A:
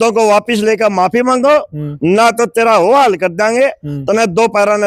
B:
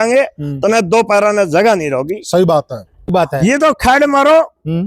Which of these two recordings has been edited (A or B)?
B